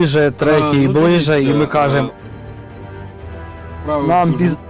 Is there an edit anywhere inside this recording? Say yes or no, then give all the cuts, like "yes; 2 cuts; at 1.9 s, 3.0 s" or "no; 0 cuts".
no; 0 cuts